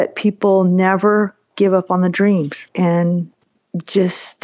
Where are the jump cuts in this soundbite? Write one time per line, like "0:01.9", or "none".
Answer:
0:02.7